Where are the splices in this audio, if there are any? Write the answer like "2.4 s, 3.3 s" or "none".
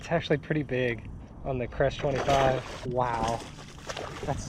2.8 s